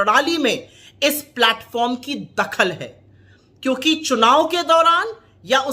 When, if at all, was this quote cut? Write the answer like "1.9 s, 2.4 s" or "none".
none